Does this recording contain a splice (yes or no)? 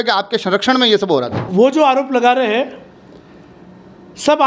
yes